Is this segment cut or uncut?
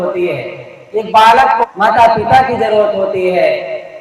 cut